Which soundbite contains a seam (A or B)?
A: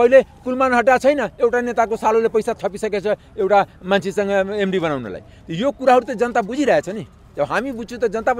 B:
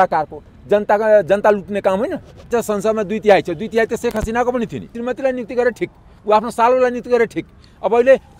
B